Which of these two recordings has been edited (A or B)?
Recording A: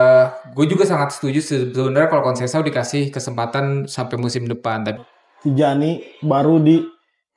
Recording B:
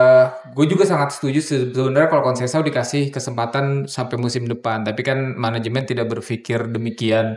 A